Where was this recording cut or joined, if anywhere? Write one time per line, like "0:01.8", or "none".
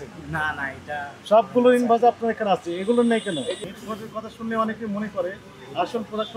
0:03.6